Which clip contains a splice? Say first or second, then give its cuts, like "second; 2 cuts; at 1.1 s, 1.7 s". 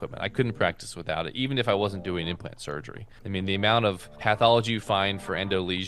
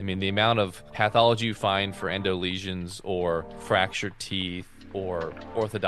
second; 2 cuts; at 3.5 s, 5.0 s